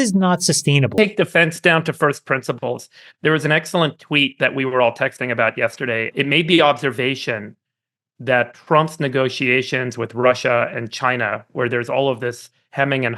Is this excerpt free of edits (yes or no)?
no